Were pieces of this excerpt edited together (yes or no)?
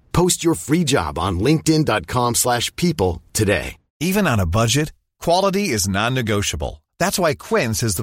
no